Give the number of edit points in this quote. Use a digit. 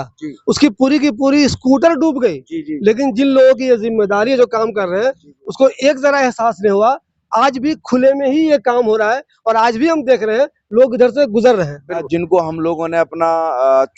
1